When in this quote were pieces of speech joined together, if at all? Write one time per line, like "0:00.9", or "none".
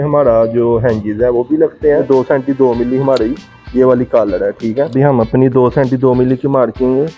0:02.0
0:04.9